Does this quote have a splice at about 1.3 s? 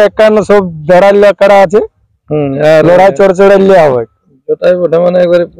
no; 0 cuts

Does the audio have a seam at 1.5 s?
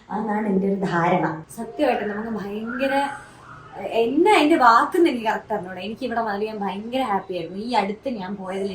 yes; 1 cut; at 1.5 s

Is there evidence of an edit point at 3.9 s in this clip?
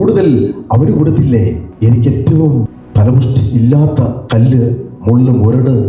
yes; 3 cuts; at 1.7 s, 2.8 s, 3.9 s

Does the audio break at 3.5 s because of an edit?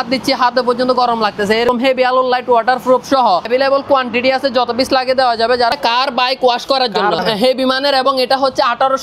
yes; 4 cuts; at 1.7 s, 3.5 s, 5.7 s, 7.2 s

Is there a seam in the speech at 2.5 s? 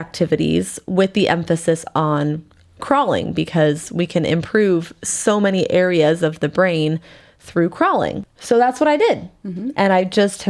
no; 1 cut; at 8.3 s

